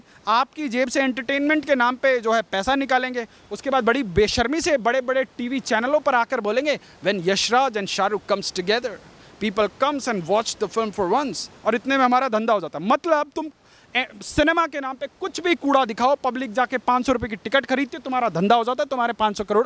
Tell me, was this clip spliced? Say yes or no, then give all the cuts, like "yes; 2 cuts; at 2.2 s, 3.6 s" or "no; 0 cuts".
no; 0 cuts